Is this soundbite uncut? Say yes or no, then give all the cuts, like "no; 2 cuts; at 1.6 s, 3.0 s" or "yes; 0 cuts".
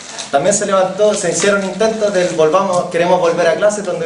yes; 0 cuts